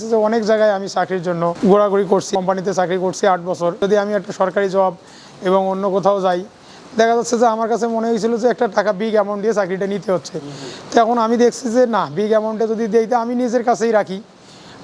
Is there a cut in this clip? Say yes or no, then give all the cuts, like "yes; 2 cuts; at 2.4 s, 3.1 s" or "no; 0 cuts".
yes; 3 cuts; at 1.5 s, 2.3 s, 3.8 s